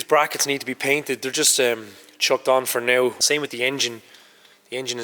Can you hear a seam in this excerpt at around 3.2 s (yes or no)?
yes